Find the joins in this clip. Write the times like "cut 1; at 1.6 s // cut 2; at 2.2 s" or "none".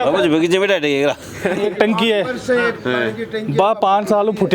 cut 1; at 1.6 s

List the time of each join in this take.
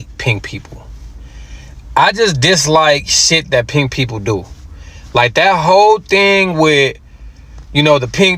none

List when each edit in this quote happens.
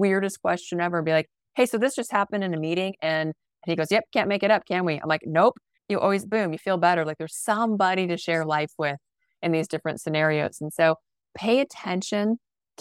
cut 1; at 3.5 s // cut 2; at 5.7 s

